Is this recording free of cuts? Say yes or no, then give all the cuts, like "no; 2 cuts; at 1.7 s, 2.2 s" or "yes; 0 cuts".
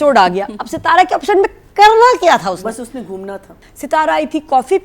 no; 1 cut; at 3.5 s